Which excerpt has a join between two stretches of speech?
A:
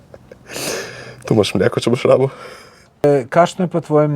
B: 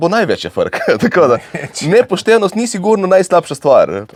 A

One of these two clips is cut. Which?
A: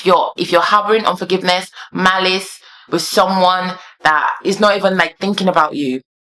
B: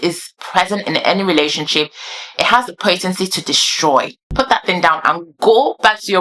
B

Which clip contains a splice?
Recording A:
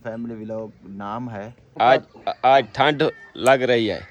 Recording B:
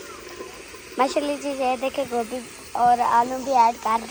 A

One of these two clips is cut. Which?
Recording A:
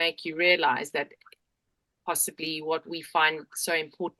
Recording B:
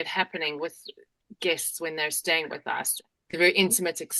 B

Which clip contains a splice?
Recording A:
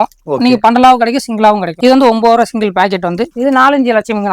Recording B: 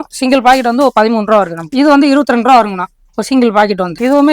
A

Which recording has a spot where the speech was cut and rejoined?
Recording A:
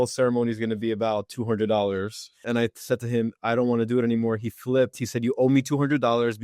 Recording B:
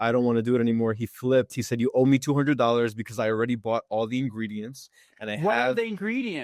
A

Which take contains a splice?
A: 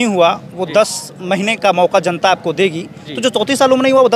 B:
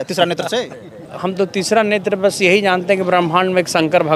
B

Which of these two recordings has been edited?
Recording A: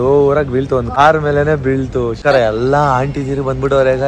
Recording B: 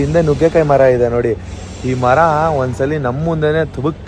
A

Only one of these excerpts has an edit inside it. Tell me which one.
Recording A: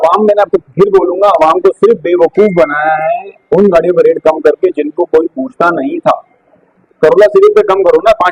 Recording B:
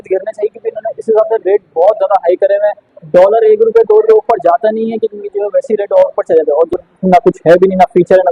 B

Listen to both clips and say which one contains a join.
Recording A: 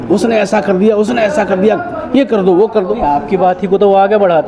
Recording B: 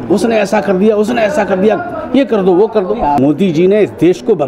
B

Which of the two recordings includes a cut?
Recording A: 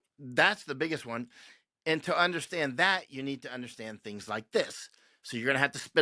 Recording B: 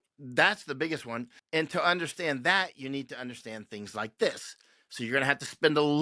B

